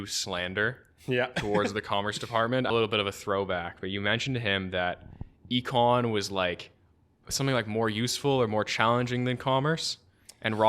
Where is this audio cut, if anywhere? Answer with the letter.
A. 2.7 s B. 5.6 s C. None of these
A